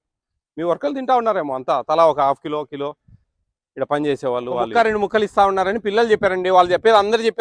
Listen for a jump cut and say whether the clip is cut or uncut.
cut